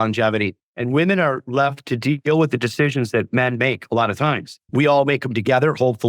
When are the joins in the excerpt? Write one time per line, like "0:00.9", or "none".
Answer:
0:04.5

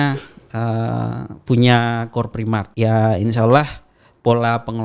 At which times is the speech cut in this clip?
0:02.7

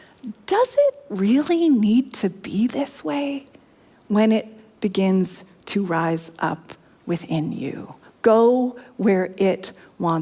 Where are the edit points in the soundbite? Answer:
none

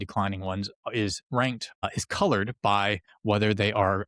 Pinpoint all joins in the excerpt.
0:01.7
0:03.1

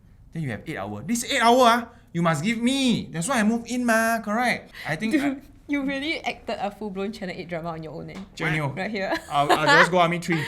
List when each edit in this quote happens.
0:04.7

